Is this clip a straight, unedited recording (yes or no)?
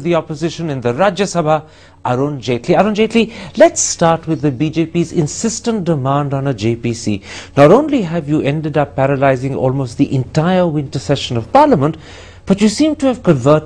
yes